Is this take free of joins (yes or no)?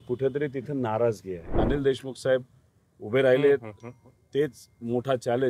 no